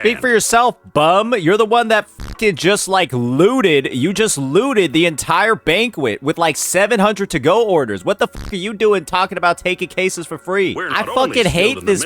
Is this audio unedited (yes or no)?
yes